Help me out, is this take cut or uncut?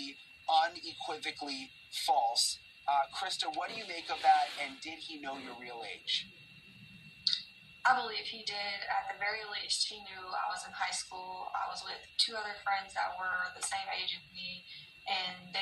cut